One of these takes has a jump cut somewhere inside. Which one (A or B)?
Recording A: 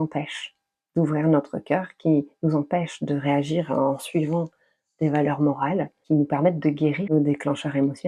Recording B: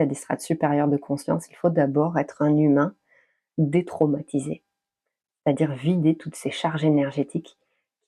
A